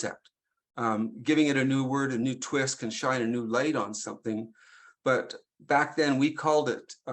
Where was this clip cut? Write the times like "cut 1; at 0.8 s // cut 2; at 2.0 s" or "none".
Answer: none